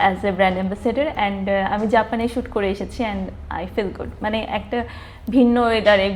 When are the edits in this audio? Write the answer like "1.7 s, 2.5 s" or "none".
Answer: none